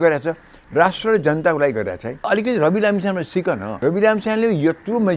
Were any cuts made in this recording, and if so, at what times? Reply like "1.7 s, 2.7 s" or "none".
2.3 s, 3.7 s